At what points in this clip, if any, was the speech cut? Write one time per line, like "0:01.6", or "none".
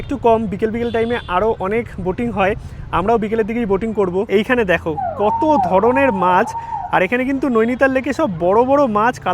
0:04.3